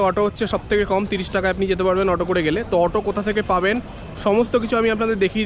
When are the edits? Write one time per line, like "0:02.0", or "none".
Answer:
none